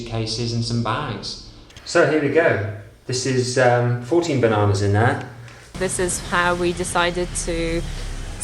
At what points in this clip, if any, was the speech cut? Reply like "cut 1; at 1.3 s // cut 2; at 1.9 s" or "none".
cut 1; at 1.8 s // cut 2; at 5.8 s